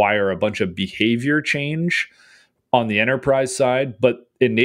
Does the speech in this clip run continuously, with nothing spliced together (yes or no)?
yes